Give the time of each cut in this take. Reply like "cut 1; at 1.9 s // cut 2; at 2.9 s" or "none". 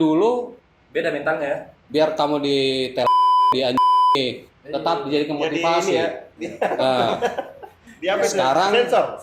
none